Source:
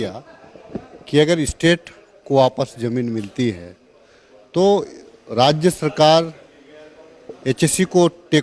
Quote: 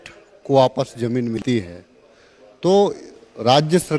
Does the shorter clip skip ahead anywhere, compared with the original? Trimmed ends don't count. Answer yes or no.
yes